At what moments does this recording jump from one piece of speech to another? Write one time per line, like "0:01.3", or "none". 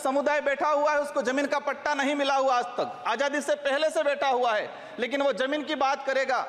none